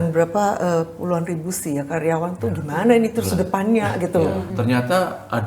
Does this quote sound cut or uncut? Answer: cut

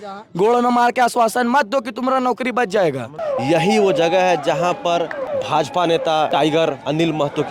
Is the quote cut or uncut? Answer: cut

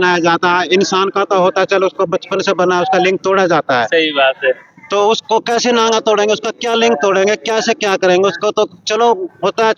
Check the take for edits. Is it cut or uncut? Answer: uncut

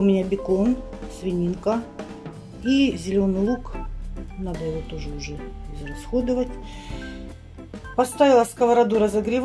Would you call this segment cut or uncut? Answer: uncut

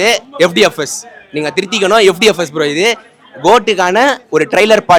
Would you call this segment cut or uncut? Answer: uncut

